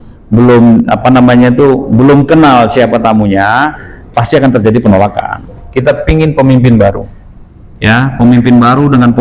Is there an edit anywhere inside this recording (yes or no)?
yes